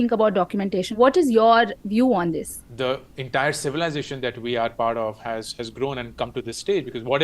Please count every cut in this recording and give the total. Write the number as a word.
two